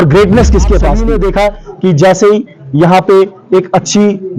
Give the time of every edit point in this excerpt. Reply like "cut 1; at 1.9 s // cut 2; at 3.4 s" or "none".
cut 1; at 1.1 s